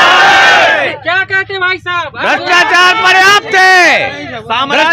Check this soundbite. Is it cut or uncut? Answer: uncut